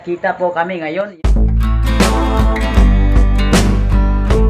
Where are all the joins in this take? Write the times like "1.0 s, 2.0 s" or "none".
1.2 s